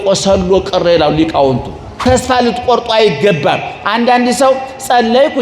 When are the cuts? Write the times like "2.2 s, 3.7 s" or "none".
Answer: 1.9 s